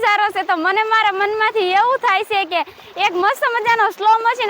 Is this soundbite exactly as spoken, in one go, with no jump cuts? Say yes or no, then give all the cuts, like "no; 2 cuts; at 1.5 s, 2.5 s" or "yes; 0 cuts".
yes; 0 cuts